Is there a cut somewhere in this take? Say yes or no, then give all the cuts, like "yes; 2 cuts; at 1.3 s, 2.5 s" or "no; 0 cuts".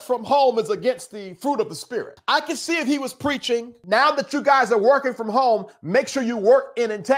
no; 0 cuts